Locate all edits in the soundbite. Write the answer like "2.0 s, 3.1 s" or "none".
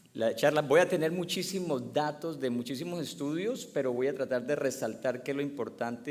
3.5 s